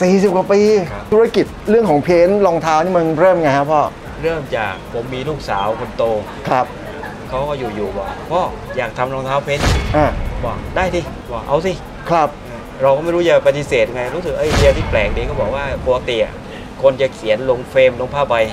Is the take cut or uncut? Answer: cut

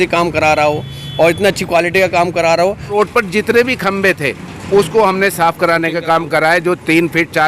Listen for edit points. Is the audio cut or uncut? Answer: cut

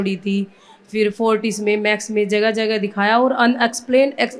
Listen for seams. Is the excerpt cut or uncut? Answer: uncut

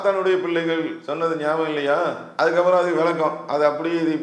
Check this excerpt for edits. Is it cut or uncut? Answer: cut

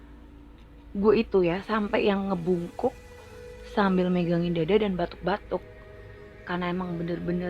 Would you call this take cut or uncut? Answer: cut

